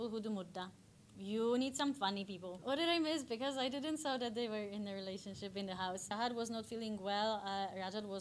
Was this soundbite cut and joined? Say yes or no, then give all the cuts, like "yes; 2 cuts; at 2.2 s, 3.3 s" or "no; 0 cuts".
yes; 2 cuts; at 2.5 s, 6.1 s